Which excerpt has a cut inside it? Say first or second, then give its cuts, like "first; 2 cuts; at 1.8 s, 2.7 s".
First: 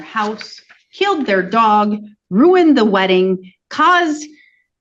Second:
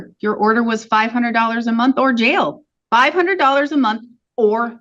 second; 1 cut; at 2.7 s